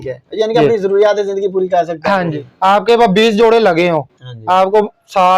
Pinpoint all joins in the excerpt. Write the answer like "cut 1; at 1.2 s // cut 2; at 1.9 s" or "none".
cut 1; at 2.3 s